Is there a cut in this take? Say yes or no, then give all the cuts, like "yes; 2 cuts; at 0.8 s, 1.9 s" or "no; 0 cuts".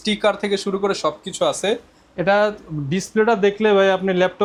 no; 0 cuts